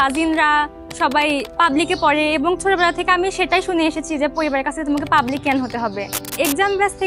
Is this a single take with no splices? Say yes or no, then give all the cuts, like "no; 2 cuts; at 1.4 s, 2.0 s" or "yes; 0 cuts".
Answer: no; 2 cuts; at 1.5 s, 6.3 s